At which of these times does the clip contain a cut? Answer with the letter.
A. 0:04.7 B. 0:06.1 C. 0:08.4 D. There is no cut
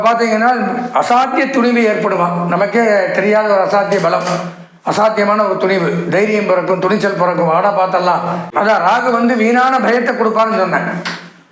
C